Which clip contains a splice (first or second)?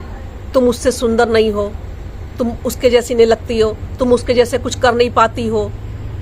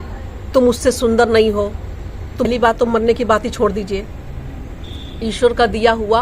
second